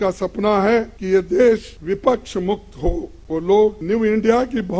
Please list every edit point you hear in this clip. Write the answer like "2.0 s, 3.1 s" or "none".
1.0 s, 1.7 s, 3.1 s, 3.8 s